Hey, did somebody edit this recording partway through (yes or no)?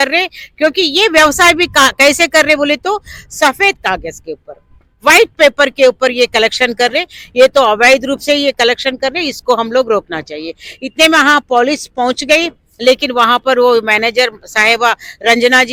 no